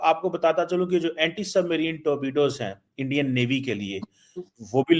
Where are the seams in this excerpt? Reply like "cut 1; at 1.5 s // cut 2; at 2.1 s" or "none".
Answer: none